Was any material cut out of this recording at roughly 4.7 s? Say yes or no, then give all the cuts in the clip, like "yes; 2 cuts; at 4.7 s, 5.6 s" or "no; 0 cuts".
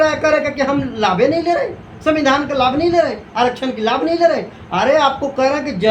no; 0 cuts